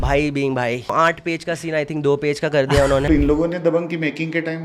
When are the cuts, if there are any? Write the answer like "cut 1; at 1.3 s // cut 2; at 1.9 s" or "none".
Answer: cut 1; at 0.9 s // cut 2; at 3.0 s